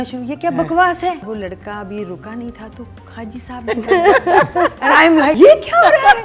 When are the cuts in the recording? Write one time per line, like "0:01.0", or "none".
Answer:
0:01.2
0:05.3